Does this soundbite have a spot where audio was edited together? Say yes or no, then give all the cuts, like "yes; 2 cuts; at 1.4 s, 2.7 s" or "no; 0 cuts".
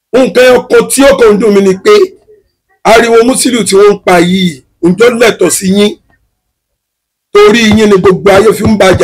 no; 0 cuts